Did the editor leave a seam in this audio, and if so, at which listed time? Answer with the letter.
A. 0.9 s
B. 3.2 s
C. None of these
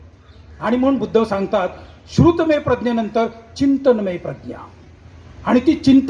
C